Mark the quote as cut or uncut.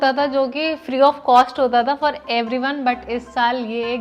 uncut